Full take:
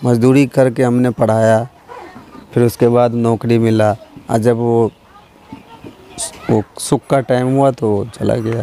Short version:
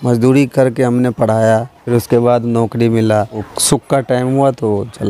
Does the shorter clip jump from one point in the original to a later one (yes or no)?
yes